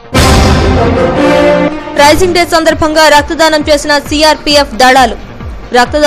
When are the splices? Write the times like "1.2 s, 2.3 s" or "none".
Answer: 1.7 s